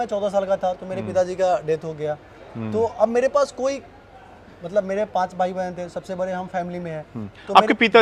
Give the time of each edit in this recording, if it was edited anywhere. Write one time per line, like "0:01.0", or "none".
none